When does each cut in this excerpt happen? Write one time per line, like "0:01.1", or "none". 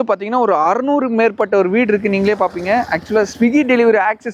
none